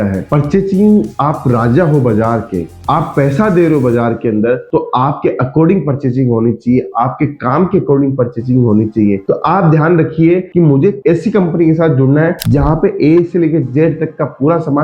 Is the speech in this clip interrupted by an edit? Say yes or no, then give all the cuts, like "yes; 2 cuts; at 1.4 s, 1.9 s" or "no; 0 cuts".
no; 0 cuts